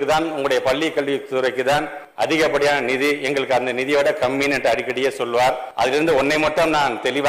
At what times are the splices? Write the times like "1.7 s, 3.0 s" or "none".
2.0 s, 5.7 s

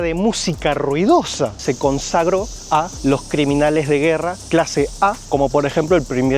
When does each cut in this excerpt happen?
1.6 s, 2.9 s, 4.4 s, 5.2 s

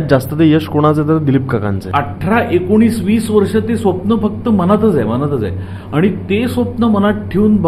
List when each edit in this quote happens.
1.8 s

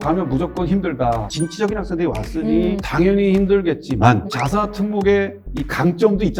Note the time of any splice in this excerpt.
1.3 s, 2.8 s, 4.3 s

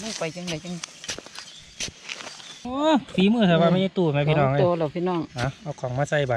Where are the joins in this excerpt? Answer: 2.7 s

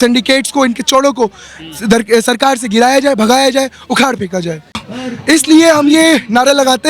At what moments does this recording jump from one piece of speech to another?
4.8 s

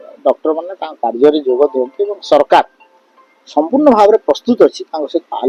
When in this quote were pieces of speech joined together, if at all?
none

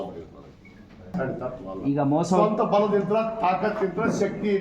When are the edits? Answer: 1.1 s

